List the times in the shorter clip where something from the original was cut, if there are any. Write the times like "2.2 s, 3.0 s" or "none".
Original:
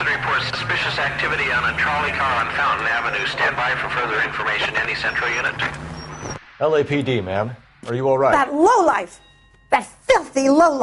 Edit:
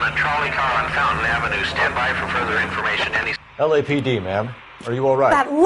3.4 s